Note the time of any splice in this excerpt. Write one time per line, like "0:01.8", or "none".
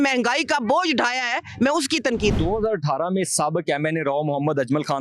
0:02.4